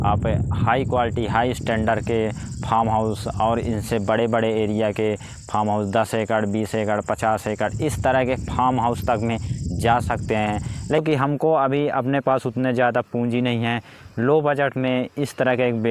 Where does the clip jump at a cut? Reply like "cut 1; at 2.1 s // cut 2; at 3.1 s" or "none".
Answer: cut 1; at 11.0 s